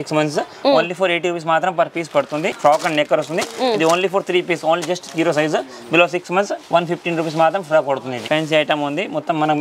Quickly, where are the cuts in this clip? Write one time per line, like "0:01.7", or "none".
0:02.5
0:08.2